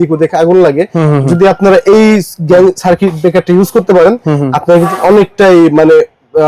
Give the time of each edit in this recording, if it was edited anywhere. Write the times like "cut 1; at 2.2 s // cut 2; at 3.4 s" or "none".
none